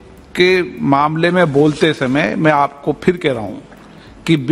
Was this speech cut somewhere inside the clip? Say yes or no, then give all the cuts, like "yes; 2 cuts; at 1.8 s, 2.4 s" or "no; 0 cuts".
no; 0 cuts